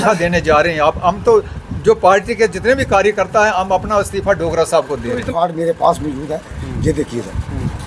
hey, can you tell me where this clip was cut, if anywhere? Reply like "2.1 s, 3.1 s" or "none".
5.2 s